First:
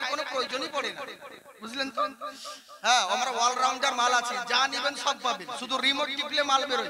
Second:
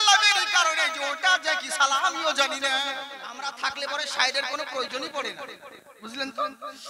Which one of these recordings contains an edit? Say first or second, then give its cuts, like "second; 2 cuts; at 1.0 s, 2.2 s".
second; 1 cut; at 3.2 s